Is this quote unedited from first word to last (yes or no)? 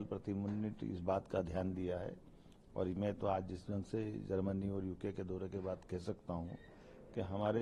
yes